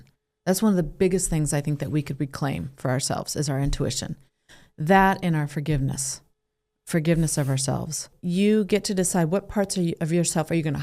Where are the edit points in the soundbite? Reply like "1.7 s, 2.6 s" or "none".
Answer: 8.1 s